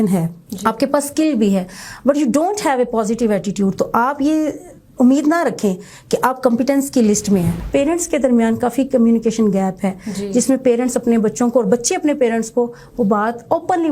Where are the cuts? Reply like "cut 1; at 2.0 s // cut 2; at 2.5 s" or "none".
cut 1; at 7.6 s